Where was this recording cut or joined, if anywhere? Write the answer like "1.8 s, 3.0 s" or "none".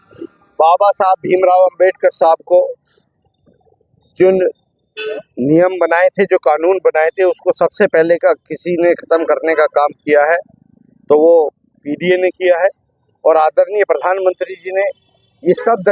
none